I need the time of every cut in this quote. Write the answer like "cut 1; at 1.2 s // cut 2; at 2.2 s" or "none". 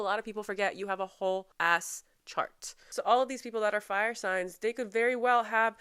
cut 1; at 1.5 s